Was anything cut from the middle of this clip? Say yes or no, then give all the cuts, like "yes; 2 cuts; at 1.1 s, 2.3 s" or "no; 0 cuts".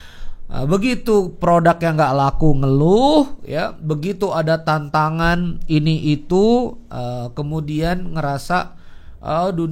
no; 0 cuts